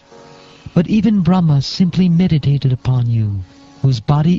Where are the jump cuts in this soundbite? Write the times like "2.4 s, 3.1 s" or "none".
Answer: 3.2 s